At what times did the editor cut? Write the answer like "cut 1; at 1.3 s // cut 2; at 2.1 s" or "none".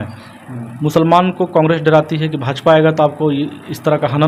none